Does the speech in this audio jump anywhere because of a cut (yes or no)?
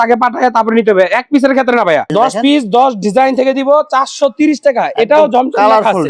yes